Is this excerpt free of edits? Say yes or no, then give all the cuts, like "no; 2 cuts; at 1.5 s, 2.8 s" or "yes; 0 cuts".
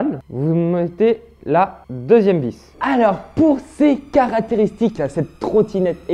no; 1 cut; at 2.7 s